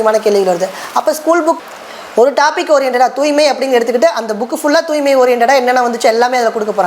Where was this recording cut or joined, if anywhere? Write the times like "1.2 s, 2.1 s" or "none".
1.6 s